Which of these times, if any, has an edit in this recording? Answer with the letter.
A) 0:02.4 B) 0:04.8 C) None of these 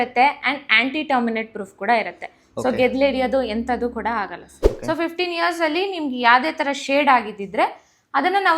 B